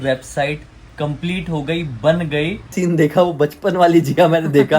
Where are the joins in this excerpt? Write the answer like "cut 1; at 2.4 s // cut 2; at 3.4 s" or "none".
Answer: cut 1; at 2.7 s